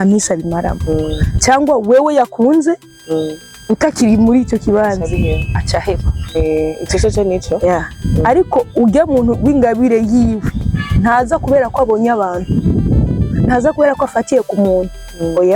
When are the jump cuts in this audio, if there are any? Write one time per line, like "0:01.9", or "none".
none